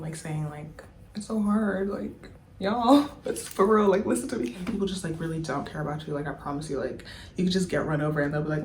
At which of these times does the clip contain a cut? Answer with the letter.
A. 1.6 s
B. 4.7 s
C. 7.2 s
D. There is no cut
B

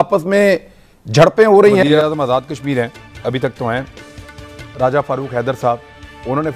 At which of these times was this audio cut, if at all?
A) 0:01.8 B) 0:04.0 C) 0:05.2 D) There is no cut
A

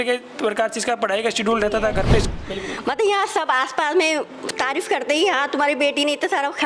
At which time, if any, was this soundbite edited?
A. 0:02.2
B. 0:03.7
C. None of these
A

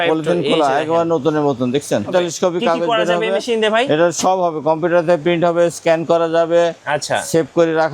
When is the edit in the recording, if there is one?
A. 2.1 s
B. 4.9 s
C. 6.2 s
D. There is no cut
A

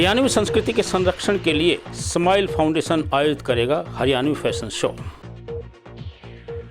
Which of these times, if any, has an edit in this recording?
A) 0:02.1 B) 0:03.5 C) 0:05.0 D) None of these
C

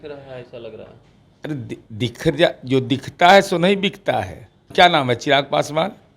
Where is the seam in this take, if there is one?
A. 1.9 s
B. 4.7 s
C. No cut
B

